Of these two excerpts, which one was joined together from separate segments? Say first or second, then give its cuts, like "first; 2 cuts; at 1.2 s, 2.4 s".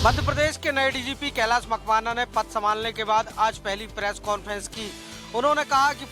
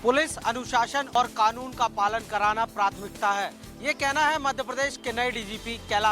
second; 1 cut; at 1.1 s